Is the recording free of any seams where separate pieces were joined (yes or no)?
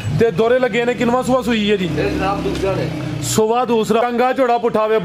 no